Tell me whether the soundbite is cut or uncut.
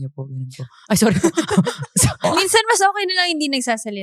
cut